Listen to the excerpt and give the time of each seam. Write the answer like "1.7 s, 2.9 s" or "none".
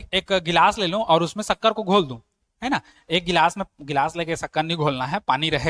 none